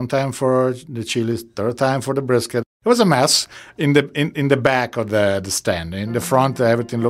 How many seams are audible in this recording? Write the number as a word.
one